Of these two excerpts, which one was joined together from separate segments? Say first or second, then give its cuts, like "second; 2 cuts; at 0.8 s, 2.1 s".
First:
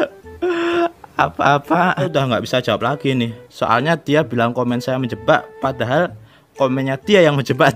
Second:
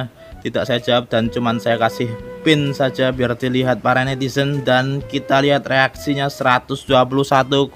first; 1 cut; at 2.1 s